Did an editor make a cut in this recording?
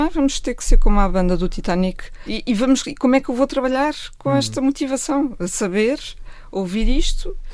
yes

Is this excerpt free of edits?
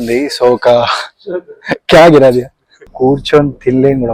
no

